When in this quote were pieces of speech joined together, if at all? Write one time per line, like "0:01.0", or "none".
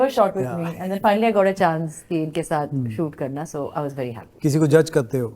0:04.3